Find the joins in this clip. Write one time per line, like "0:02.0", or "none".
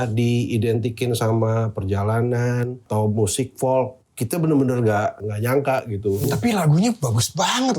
0:02.9
0:05.2
0:06.2